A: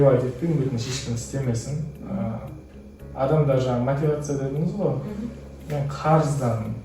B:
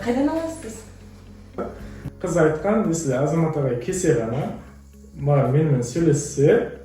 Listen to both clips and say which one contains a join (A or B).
B